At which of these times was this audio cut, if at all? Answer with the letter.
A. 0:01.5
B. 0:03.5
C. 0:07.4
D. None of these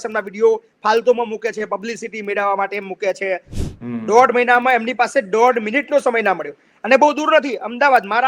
B